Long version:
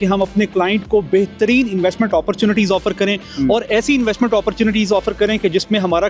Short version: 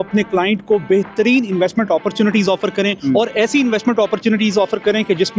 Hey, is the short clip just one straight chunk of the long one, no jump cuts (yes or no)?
no